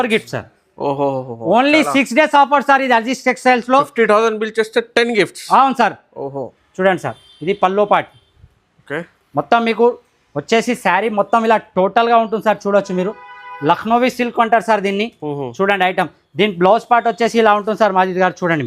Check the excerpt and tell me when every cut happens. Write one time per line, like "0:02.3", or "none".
0:06.6

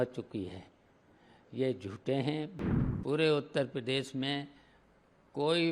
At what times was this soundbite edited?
0:02.6

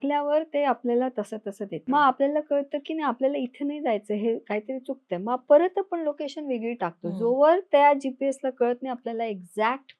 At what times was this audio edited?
0:01.8

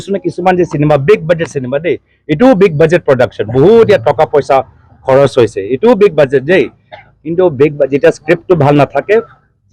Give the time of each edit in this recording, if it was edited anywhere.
none

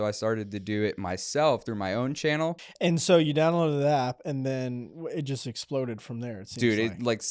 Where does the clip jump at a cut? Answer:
0:02.6

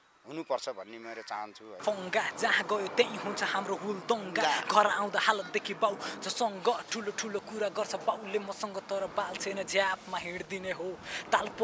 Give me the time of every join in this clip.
0:01.8

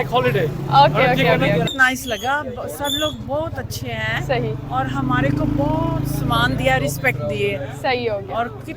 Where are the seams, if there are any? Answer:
0:01.7

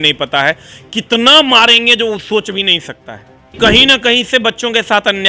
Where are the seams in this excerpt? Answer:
0:03.5

